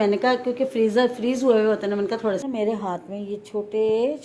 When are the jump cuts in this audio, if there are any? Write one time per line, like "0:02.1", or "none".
0:02.4